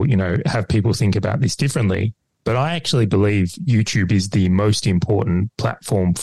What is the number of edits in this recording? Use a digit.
0